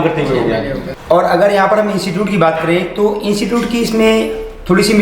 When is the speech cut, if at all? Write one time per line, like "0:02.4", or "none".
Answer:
0:00.9